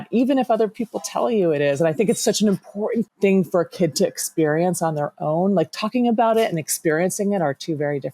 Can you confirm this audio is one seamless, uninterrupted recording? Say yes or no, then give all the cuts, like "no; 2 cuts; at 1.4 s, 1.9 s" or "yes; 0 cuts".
no; 1 cut; at 3.1 s